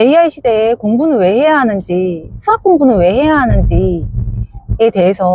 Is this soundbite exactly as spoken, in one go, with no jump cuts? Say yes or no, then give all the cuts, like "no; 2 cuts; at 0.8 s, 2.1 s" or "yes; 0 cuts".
yes; 0 cuts